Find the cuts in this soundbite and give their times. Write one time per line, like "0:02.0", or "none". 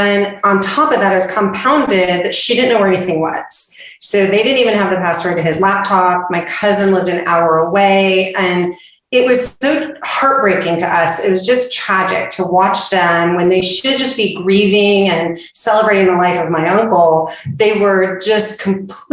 none